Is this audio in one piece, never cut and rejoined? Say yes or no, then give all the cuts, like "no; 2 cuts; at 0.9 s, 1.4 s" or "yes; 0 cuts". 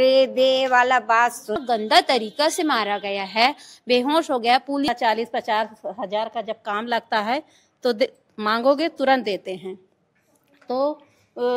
no; 2 cuts; at 1.6 s, 4.9 s